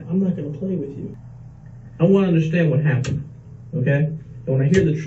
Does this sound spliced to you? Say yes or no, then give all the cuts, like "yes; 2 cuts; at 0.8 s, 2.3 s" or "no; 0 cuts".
yes; 1 cut; at 1.1 s